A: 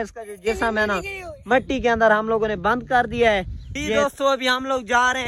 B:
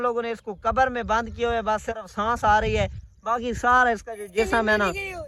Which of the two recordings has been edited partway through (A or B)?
A